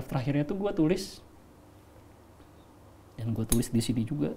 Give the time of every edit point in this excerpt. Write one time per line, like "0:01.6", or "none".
none